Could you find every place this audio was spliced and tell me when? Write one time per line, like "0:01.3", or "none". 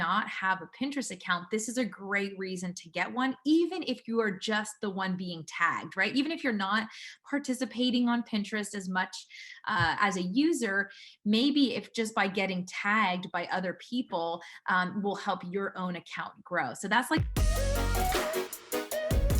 0:17.2